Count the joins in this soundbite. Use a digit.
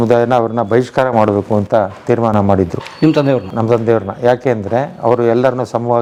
0